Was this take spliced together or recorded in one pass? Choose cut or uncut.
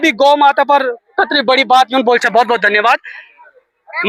uncut